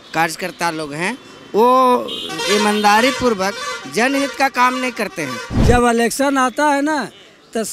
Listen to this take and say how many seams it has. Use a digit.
1